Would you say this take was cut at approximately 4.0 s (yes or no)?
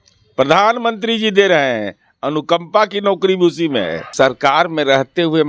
yes